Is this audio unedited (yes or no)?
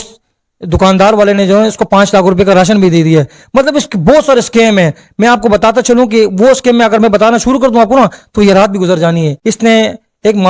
no